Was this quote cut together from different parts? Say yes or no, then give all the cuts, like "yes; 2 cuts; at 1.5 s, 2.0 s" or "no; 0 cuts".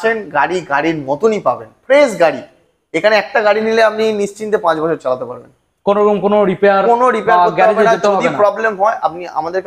no; 0 cuts